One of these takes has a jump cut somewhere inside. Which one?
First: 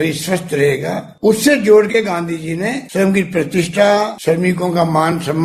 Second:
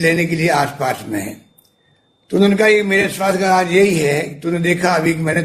first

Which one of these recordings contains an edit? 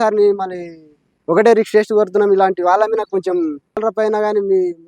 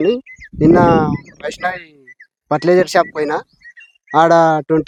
first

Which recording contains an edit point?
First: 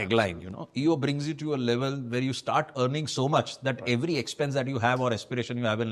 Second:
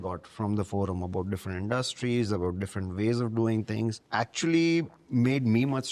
second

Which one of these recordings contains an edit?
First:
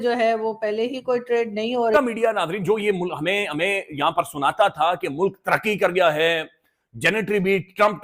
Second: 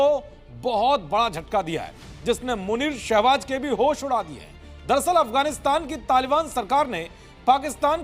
first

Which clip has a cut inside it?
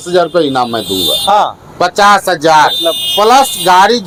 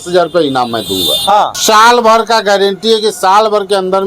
second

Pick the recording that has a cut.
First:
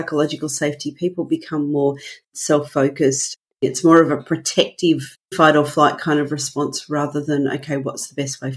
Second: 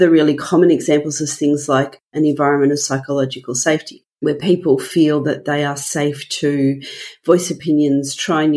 first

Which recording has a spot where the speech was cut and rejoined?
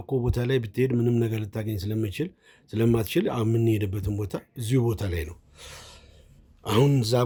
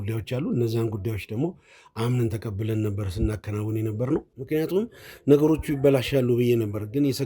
second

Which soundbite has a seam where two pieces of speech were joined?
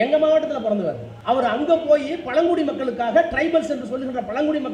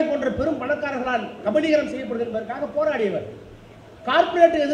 first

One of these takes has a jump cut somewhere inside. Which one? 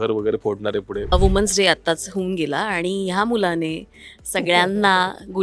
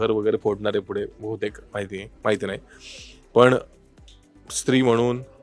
first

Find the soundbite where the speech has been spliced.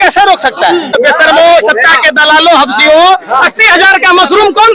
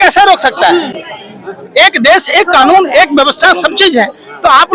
first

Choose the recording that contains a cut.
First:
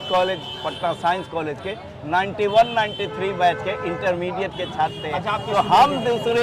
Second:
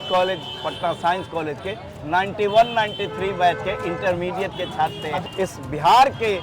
second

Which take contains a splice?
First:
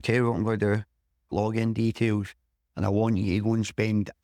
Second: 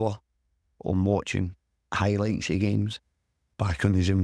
first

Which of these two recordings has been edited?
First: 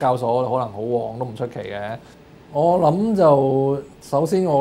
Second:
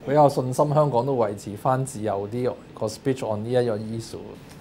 first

